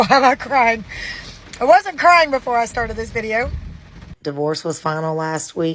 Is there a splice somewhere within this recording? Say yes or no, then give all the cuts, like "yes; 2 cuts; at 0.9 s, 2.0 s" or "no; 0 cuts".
yes; 1 cut; at 4.1 s